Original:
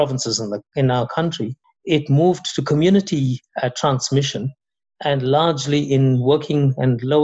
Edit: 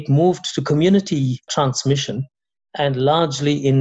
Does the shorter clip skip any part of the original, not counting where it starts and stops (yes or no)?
yes